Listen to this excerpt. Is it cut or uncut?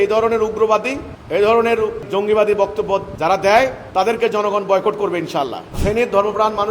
cut